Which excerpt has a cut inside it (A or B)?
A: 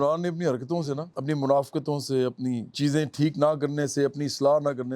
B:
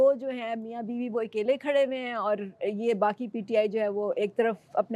A